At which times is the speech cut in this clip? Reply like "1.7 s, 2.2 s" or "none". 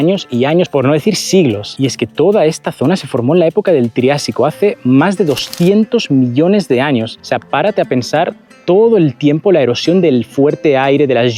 none